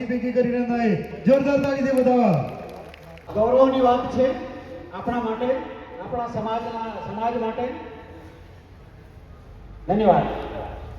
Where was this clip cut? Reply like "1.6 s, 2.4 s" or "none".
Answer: 3.3 s